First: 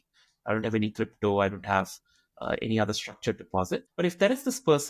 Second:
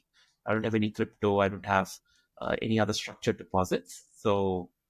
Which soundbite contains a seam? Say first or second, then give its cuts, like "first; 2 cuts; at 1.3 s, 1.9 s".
first; 1 cut; at 3.9 s